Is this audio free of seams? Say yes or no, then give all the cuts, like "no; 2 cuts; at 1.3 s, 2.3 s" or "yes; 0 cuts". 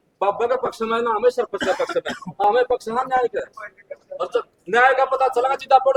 yes; 0 cuts